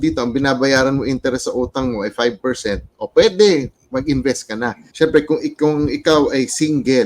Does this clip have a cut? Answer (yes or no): yes